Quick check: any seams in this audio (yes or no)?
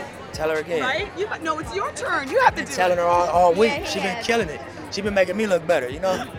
no